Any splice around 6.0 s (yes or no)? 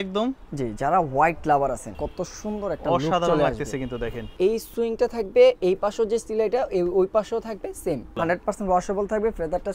no